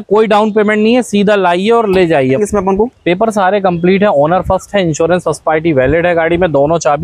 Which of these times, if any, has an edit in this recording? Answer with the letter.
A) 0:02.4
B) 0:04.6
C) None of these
A